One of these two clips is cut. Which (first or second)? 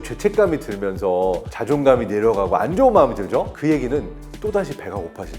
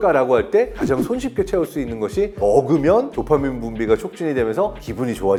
first